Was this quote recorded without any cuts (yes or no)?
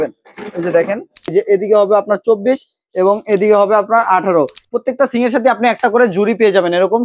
no